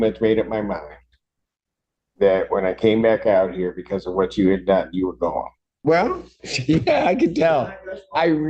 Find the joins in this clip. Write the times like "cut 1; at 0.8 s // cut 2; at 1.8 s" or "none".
cut 1; at 5.8 s